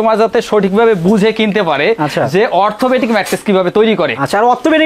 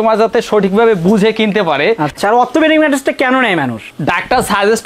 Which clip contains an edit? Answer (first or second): second